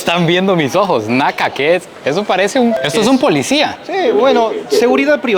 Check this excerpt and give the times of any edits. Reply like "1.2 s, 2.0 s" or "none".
2.8 s